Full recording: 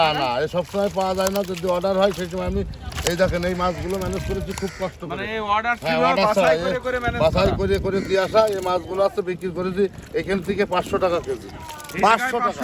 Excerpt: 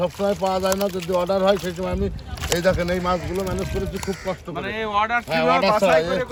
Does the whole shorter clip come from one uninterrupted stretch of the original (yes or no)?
yes